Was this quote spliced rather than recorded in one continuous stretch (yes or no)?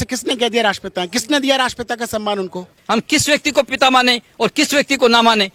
no